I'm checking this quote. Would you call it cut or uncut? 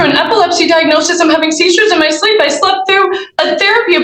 uncut